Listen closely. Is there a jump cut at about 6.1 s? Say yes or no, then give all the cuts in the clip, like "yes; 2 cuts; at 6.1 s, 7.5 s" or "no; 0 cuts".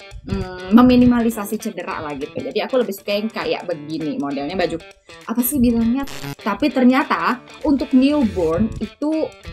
yes; 1 cut; at 6.1 s